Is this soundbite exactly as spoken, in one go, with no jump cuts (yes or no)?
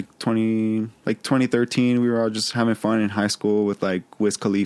yes